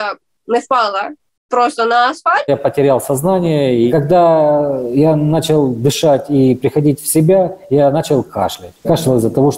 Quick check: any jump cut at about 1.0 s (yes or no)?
no